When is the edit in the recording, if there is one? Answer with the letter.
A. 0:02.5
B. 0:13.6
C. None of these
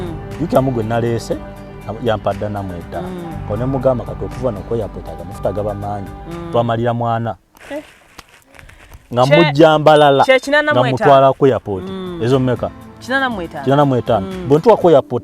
C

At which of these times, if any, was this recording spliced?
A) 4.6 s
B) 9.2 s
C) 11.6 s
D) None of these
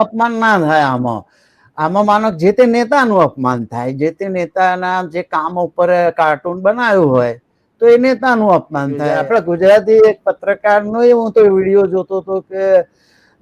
B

